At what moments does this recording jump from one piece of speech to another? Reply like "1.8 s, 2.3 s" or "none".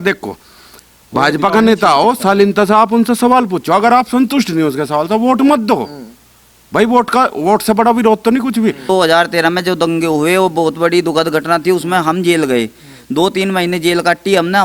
8.9 s

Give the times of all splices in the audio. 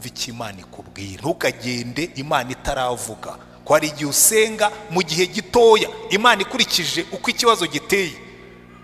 1.2 s

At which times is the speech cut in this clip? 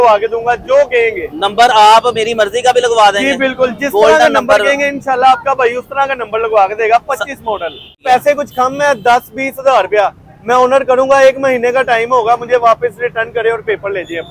8.0 s

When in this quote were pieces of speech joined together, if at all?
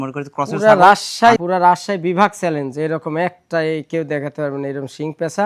1.4 s

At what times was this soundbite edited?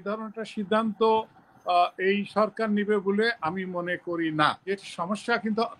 4.6 s

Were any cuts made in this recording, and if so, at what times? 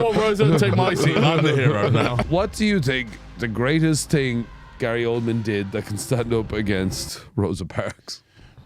2.2 s

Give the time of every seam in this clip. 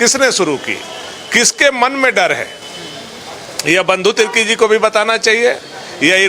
none

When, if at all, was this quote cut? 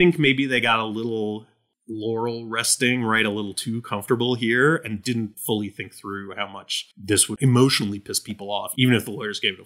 5.1 s, 7.4 s, 8.7 s

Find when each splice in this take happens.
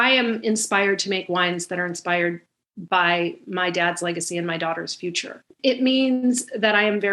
5.4 s

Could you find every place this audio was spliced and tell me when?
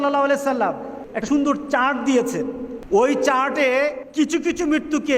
1.1 s, 2.7 s, 4.0 s

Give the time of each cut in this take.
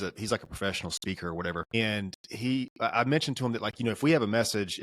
1.7 s

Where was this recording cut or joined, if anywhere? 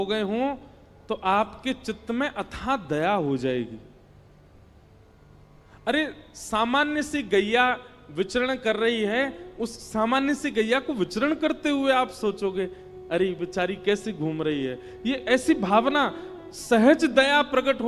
none

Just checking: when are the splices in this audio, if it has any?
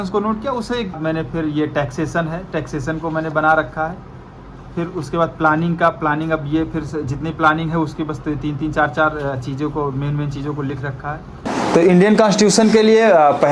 1.0 s, 11.5 s

